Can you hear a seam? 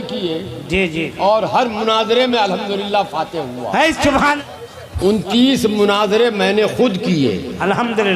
yes; 1 cut; at 4.4 s

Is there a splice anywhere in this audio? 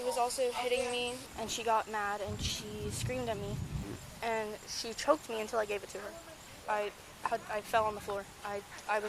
yes; 3 cuts; at 1.2 s, 3.8 s, 6.5 s

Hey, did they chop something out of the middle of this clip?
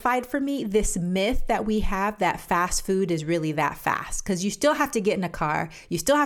no; 0 cuts

